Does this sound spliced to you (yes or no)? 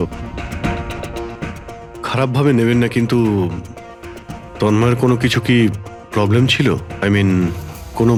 no